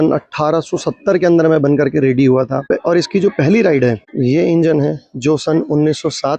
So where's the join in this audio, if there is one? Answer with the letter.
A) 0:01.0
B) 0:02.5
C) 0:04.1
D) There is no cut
C